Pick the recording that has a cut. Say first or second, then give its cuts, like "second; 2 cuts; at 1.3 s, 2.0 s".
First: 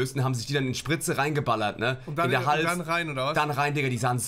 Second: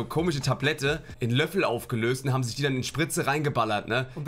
second; 1 cut; at 1.1 s